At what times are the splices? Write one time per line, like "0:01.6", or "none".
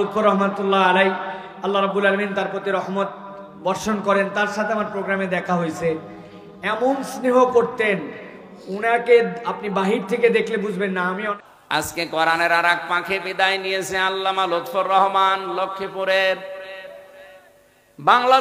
0:11.4